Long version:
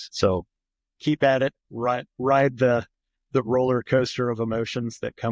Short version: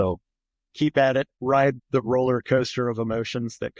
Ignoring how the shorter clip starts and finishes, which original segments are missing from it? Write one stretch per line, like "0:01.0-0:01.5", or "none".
0:01.7-0:02.9